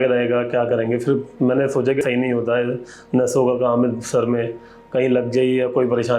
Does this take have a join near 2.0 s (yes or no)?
yes